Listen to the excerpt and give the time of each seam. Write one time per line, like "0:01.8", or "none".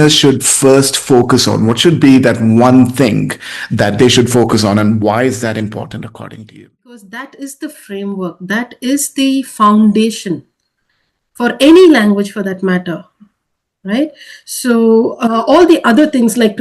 0:07.1